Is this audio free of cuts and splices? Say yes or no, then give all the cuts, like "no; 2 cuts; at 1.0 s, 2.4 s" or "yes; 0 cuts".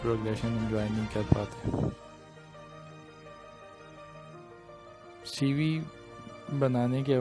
no; 2 cuts; at 1.9 s, 5.3 s